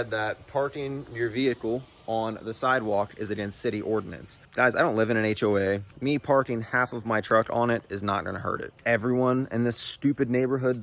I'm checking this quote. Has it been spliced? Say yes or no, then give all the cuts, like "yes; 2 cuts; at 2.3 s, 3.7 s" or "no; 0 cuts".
yes; 3 cuts; at 4.4 s, 5.9 s, 8.8 s